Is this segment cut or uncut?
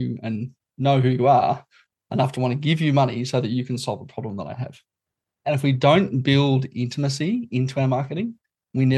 cut